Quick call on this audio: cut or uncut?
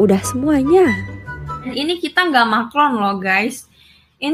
cut